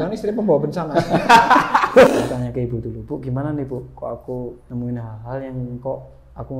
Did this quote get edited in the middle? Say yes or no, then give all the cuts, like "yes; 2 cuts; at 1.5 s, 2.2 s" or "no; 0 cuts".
yes; 2 cuts; at 2.1 s, 4.6 s